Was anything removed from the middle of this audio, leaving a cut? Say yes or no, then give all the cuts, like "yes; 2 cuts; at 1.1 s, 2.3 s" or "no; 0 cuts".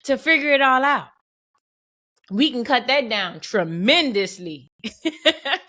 no; 0 cuts